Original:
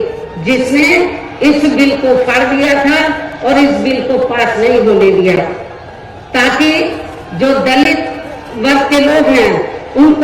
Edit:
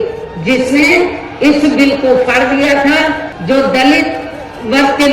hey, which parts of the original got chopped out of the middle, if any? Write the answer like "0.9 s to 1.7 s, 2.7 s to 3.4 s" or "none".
3.3 s to 7.2 s